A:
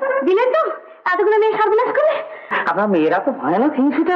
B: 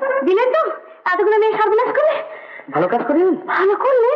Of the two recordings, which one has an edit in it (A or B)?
A